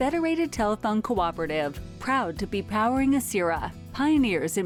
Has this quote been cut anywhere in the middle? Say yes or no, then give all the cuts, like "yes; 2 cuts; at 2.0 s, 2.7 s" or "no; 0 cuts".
no; 0 cuts